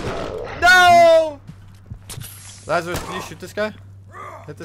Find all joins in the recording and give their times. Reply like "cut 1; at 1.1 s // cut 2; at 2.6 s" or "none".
cut 1; at 1.4 s